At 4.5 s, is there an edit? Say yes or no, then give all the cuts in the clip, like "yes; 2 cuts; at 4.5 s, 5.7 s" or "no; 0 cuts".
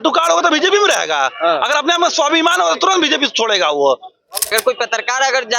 yes; 1 cut; at 4.5 s